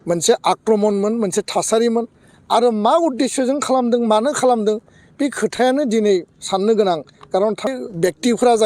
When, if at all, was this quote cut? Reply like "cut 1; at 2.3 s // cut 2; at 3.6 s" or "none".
cut 1; at 7.7 s

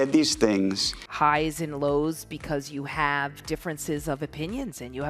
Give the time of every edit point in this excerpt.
cut 1; at 1.0 s

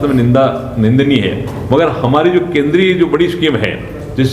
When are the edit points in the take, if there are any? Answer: none

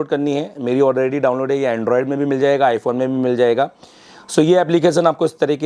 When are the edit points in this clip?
none

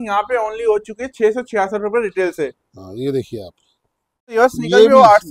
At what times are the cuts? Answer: cut 1; at 4.3 s

